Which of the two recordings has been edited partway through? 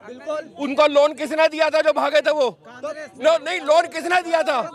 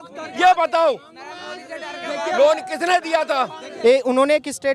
second; 1 cut; at 3.6 s

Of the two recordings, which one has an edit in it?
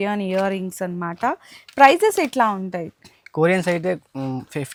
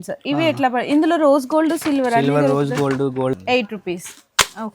second; 1 cut; at 3.3 s

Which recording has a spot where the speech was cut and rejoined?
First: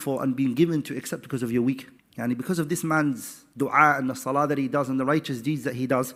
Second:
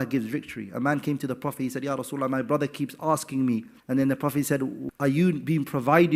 second; 1 cut; at 4.8 s

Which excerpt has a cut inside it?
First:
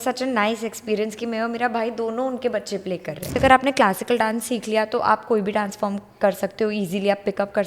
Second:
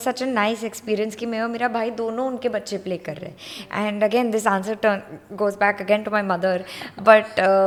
first; 1 cut; at 3.4 s

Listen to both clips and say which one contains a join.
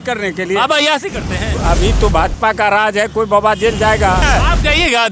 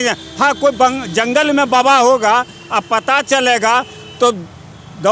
first; 2 cuts; at 1.6 s, 4.3 s

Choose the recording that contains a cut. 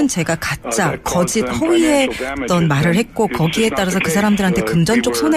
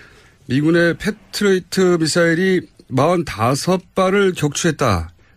second; 1 cut; at 1.6 s

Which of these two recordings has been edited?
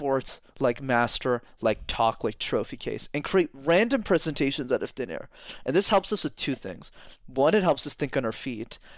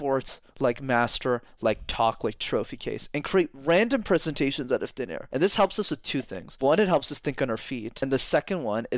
second; 3 cuts; at 5.2 s, 6.4 s, 7.9 s

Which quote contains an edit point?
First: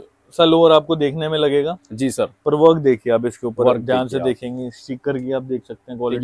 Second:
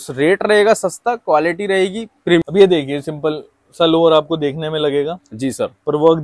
second; 1 cut; at 2.4 s

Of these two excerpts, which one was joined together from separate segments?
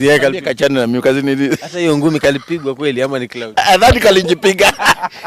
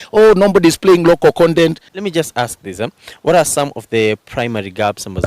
second; 1 cut; at 1.9 s

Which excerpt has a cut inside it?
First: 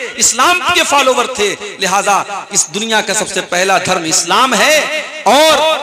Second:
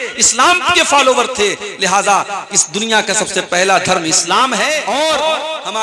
second; 1 cut; at 4.8 s

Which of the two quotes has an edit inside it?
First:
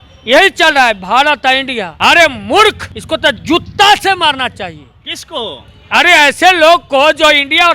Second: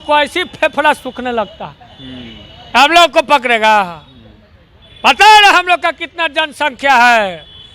first; 2 cuts; at 1.8 s, 2.9 s

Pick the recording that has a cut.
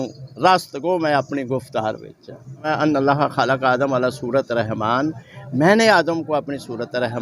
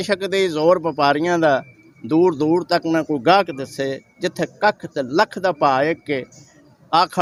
first; 1 cut; at 2.6 s

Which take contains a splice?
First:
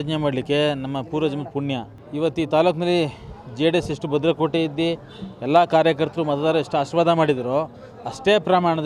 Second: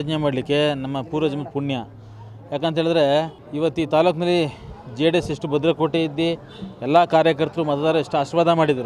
first; 1 cut; at 2.0 s

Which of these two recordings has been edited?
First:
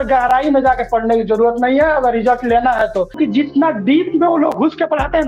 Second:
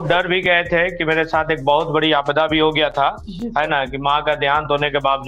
first; 1 cut; at 3.1 s

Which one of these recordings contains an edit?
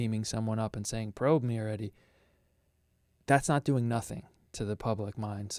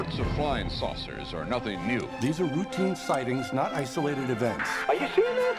second; 1 cut; at 4.7 s

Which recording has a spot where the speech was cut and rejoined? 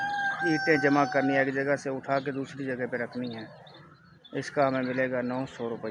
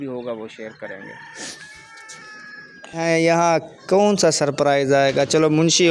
second; 1 cut; at 3.0 s

